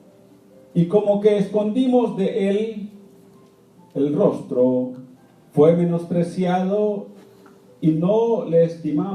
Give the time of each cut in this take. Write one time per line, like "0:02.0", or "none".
0:02.2